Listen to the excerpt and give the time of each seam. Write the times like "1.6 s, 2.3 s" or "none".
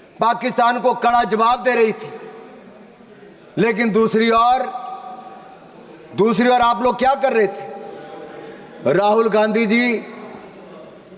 none